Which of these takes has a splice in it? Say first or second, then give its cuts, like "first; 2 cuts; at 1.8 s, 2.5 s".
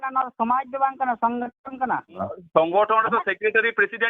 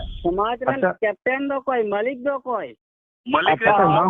first; 1 cut; at 2.3 s